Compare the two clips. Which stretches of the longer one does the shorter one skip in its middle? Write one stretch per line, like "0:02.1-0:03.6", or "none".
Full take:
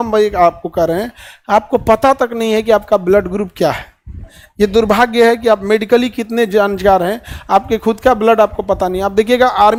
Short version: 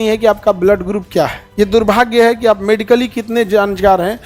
0:03.9-0:04.4

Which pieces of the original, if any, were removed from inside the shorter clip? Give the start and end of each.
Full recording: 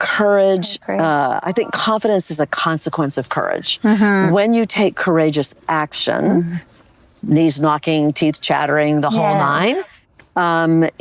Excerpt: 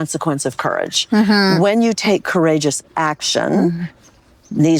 none

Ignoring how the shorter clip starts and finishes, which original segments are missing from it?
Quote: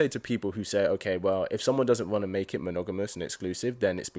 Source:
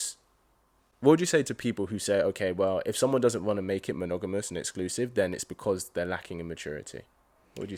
none

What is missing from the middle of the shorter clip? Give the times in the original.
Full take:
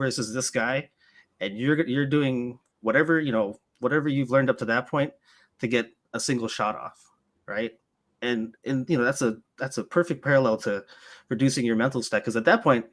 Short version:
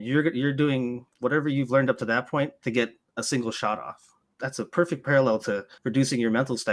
0:02.6-0:03.7
0:05.2-0:05.5
0:07.3-0:09.5
0:10.9-0:11.2

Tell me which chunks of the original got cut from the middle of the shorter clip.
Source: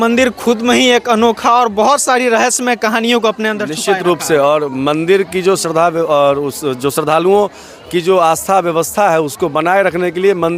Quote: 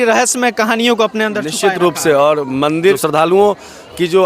0:05.2-0:06.9

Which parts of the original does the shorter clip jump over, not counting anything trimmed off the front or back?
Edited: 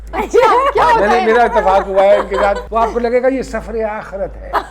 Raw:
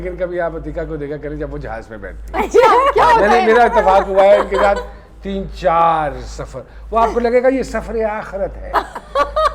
0:04.8-0:06.8

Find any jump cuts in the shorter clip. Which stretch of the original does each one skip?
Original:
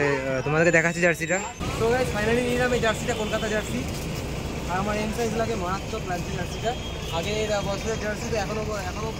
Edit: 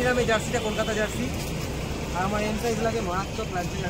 none

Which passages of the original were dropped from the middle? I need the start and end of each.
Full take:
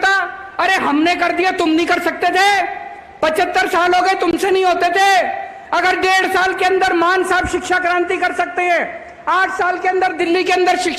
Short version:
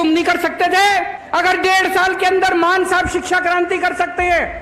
0:02.8-0:05.6

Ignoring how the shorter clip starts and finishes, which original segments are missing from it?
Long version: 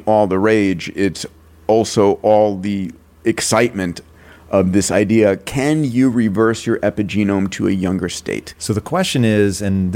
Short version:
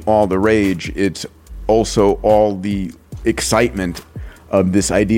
none

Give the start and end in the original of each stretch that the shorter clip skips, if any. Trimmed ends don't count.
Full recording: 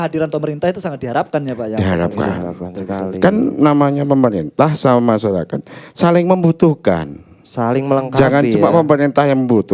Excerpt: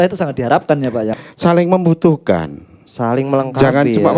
0:01.7-0:05.7

